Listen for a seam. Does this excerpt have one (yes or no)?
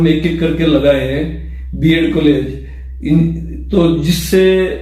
no